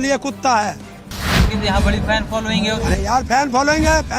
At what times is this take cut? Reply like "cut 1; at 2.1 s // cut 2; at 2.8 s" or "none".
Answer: cut 1; at 1.3 s